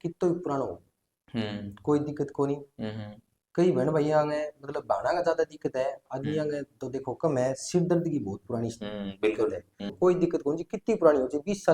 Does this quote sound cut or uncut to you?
cut